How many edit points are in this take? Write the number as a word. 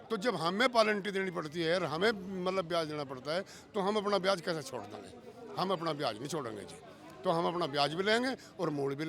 zero